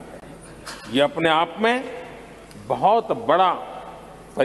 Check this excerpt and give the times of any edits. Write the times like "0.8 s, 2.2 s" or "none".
none

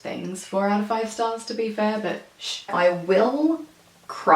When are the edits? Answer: 2.7 s

